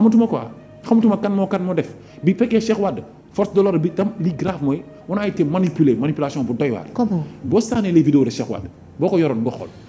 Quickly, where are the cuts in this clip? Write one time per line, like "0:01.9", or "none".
none